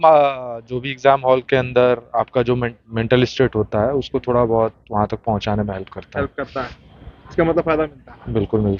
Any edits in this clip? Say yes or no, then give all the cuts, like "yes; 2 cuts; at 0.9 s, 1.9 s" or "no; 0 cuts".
no; 0 cuts